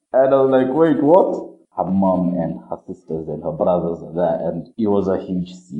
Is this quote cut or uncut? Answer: cut